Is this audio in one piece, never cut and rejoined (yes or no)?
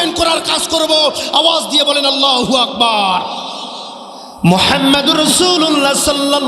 no